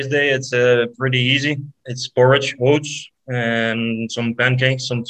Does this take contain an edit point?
no; 0 cuts

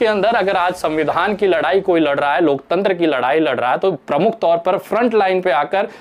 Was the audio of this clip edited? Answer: no; 0 cuts

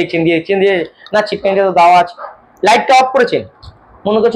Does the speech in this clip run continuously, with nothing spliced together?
yes; 0 cuts

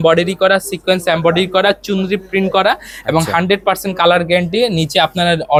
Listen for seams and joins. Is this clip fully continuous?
yes; 0 cuts

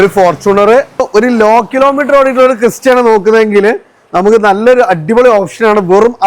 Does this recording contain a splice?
yes; 1 cut; at 1.0 s

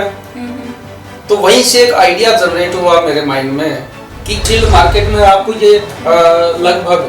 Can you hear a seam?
yes; 1 cut; at 4.4 s

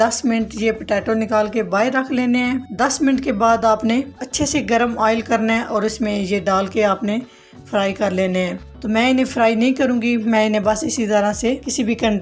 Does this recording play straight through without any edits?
yes; 0 cuts

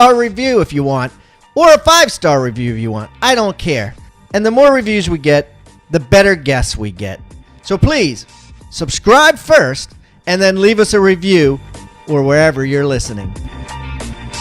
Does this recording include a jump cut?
yes; 1 cut; at 13.3 s

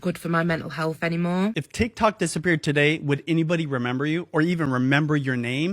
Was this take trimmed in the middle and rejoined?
yes; 1 cut; at 1.6 s

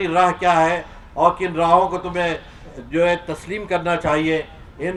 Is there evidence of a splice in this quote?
no; 0 cuts

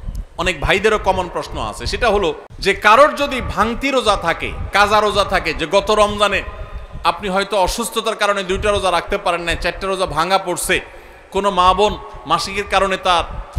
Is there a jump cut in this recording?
yes; 1 cut; at 2.5 s

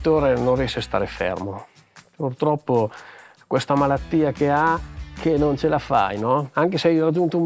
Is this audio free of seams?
yes; 0 cuts

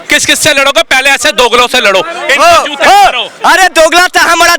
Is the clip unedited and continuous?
yes; 0 cuts

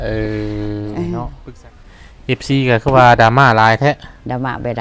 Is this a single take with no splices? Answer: no; 1 cut; at 1.4 s

